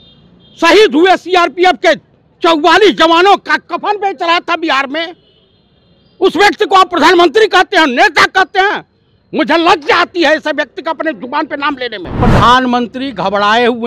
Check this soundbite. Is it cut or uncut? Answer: cut